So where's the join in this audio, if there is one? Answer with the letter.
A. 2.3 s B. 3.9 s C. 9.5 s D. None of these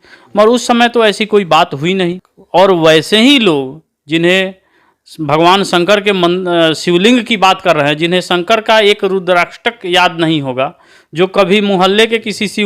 A